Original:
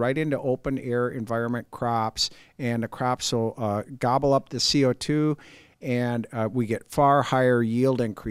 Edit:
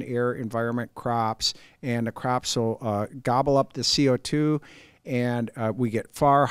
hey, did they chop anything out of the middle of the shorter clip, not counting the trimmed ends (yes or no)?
no